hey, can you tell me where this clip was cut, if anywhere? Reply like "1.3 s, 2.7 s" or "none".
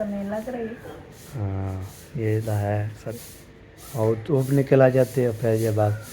3.1 s